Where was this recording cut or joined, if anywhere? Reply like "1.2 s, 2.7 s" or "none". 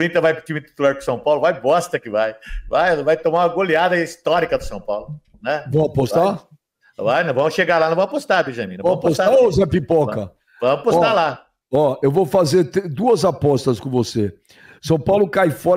12.5 s